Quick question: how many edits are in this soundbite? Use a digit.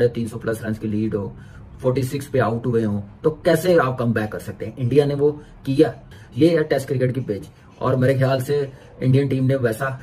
1